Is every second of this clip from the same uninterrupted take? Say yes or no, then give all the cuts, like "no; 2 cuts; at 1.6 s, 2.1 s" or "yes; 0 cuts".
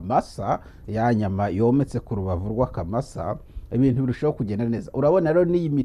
yes; 0 cuts